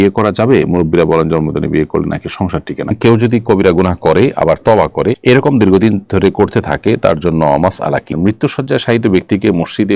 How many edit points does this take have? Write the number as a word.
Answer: two